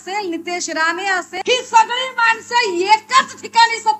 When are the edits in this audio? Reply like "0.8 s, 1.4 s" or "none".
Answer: 1.3 s